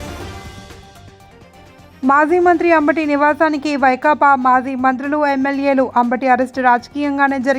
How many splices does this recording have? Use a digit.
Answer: 1